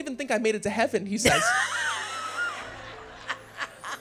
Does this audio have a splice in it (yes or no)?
no